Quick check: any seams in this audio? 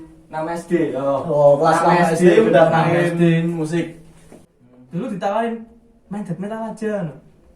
yes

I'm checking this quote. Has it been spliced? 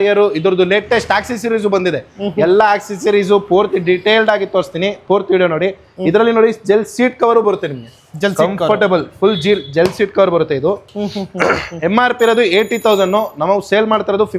no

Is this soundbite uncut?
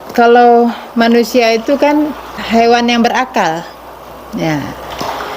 no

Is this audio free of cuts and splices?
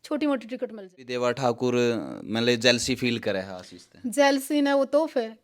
no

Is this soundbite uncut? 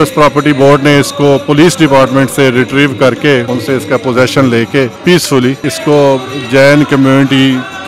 no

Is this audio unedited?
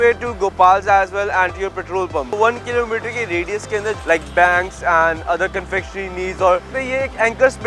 no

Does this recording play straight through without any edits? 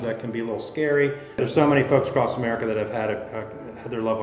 no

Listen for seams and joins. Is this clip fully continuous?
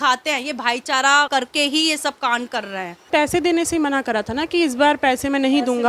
no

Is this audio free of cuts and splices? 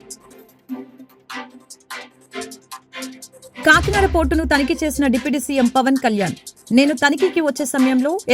no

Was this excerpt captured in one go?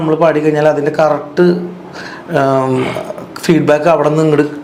yes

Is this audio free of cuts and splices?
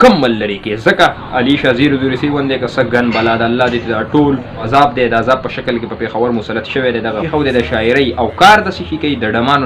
no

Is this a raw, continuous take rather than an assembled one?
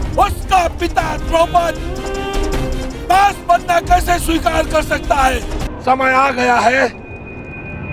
no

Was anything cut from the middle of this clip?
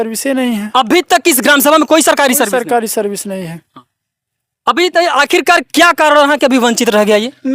no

